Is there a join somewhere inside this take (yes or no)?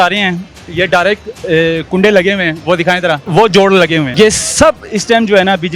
yes